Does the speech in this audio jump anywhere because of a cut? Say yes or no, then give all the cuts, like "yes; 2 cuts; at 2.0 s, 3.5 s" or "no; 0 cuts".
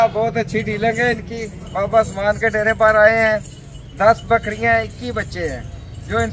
no; 0 cuts